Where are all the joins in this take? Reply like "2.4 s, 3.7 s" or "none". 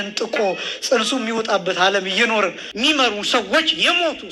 2.6 s